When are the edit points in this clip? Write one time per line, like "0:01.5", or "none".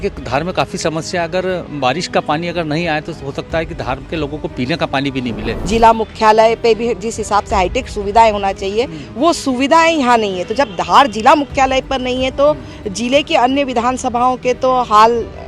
0:05.5